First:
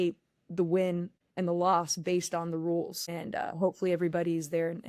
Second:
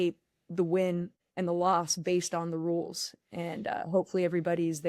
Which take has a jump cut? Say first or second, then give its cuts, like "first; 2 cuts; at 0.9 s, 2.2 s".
first; 1 cut; at 3.0 s